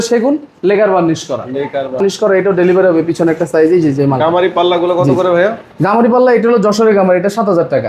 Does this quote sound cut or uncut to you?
cut